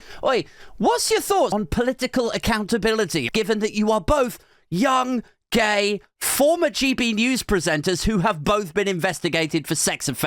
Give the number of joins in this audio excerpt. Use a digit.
2